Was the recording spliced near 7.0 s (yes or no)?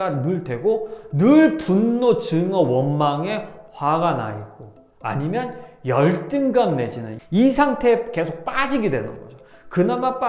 yes